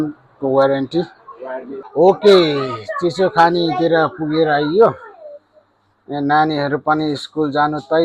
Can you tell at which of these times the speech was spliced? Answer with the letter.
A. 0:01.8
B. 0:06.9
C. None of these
A